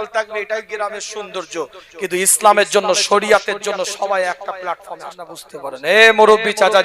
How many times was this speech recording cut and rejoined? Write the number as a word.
one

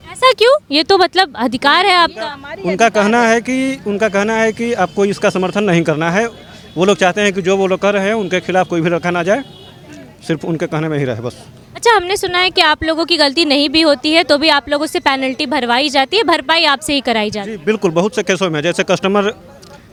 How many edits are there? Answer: zero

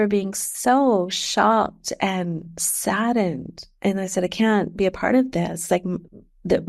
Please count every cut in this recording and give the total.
zero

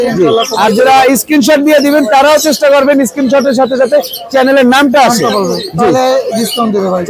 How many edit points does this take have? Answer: zero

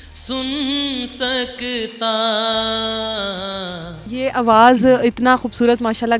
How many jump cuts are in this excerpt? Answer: one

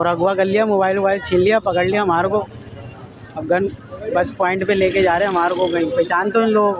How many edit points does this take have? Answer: zero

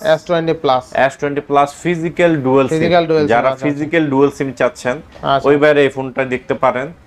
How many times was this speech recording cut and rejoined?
zero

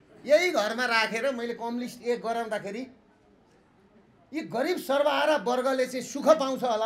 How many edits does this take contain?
zero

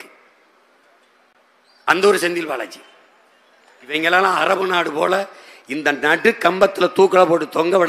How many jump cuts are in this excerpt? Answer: one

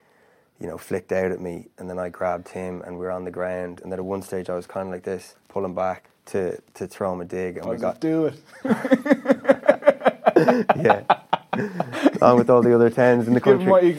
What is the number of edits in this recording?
three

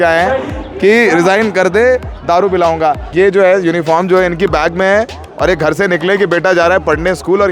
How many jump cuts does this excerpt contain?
one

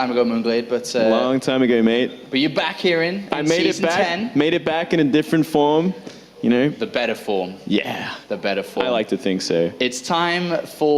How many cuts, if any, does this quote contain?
one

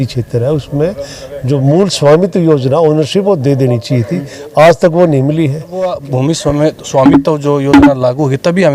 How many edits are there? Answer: one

